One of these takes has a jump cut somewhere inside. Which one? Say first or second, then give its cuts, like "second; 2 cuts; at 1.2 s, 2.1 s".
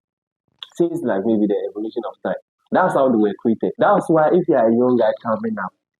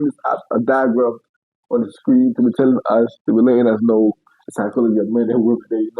first; 1 cut; at 3.8 s